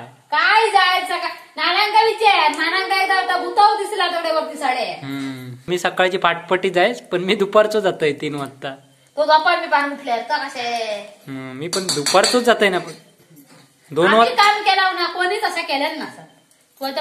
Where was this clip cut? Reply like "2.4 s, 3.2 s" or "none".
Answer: 5.7 s

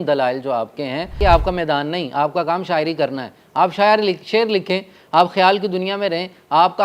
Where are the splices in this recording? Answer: 1.1 s

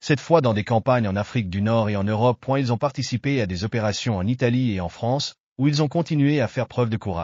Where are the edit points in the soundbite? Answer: none

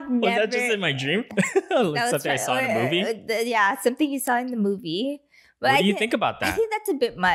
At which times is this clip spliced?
1.3 s

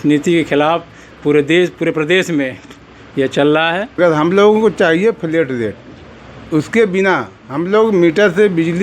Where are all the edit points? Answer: 4.0 s

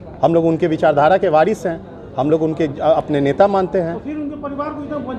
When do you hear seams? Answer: none

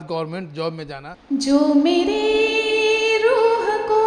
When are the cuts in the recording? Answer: 1.1 s

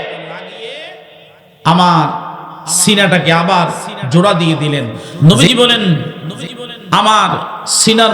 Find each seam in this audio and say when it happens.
5.0 s

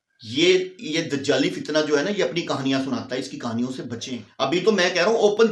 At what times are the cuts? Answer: 4.2 s

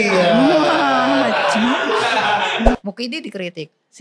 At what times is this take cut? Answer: 2.7 s

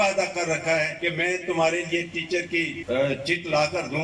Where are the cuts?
0.9 s, 2.8 s

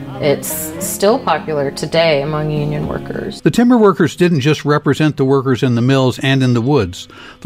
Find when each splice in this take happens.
3.3 s

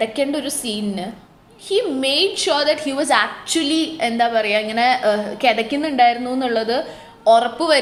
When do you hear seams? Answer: none

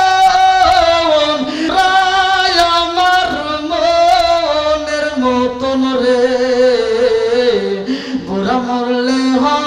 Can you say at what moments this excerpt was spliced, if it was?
1.6 s

